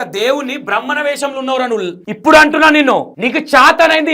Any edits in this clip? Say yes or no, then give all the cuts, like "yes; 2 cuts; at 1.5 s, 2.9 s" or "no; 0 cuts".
yes; 1 cut; at 2.1 s